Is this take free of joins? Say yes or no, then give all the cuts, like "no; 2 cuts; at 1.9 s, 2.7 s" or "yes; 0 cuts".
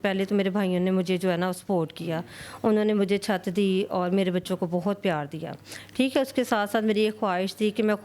yes; 0 cuts